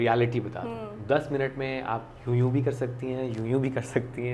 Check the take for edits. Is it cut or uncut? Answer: uncut